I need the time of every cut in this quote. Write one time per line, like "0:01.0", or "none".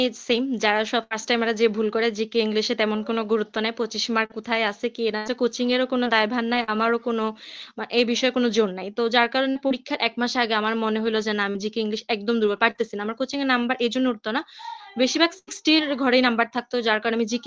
none